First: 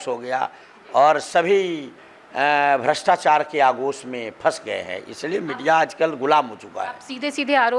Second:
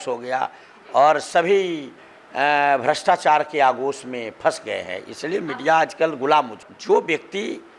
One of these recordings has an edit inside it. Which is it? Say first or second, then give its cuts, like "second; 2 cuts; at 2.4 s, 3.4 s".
second; 1 cut; at 6.7 s